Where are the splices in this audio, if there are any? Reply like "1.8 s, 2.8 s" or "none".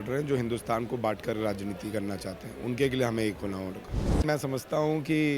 4.2 s